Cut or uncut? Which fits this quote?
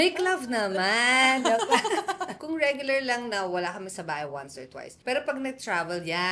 cut